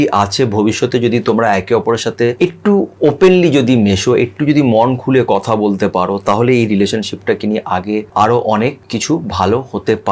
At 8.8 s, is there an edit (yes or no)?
yes